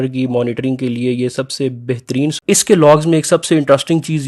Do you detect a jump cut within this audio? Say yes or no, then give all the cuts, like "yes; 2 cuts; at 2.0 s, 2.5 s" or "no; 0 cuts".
yes; 1 cut; at 2.4 s